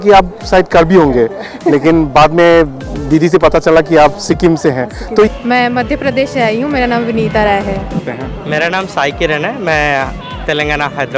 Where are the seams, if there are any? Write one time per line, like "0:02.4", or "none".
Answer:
0:05.3
0:08.0